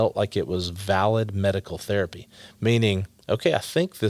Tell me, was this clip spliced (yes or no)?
yes